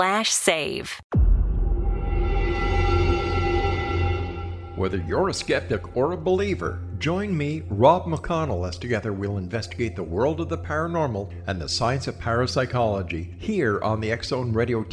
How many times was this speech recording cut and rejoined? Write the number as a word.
one